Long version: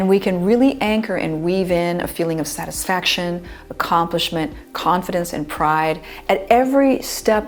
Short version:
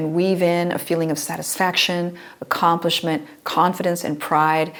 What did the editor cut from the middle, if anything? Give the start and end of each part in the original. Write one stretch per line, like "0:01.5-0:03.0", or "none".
none